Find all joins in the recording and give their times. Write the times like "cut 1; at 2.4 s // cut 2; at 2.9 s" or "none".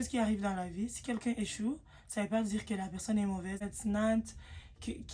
cut 1; at 3.6 s